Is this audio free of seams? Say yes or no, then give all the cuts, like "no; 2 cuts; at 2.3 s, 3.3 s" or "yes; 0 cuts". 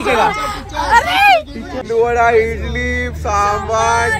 no; 1 cut; at 1.9 s